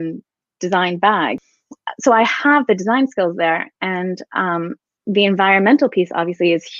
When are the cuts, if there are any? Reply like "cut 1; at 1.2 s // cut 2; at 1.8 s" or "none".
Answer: cut 1; at 1.4 s